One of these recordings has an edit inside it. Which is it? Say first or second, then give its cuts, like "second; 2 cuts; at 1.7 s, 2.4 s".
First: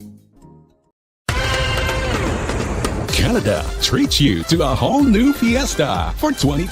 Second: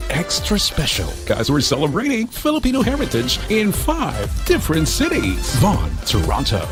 first; 1 cut; at 1.4 s